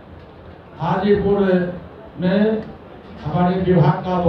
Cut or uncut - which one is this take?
uncut